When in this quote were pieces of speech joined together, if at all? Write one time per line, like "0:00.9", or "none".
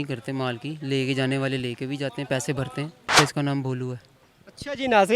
0:03.2

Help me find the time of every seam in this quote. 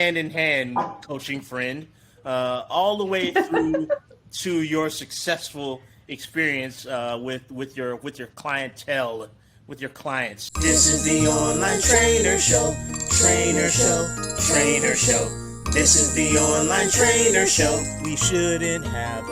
0:10.4

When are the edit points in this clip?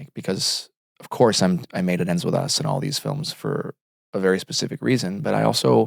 none

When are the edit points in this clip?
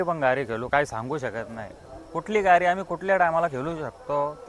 none

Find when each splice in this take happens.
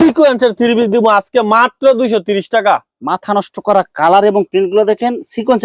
none

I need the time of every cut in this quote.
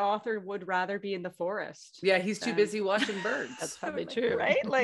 none

